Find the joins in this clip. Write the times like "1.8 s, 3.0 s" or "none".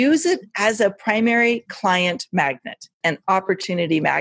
3.0 s

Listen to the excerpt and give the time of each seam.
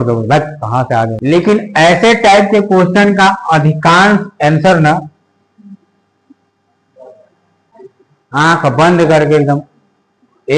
1.2 s, 7.6 s

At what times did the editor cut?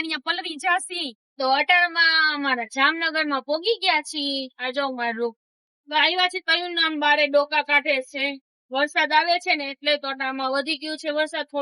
1.2 s

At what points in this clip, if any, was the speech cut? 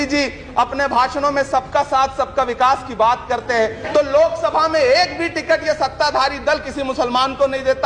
3.8 s

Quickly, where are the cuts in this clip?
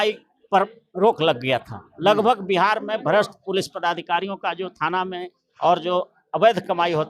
none

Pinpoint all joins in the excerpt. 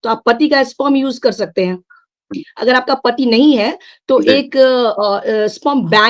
none

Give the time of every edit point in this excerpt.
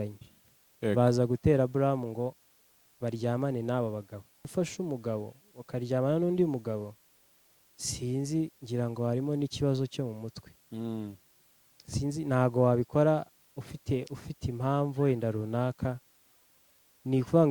4.4 s

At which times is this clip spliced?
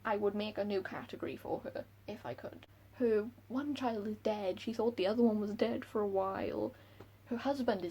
2.6 s

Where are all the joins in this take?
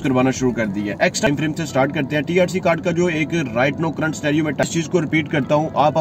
1.3 s, 4.6 s

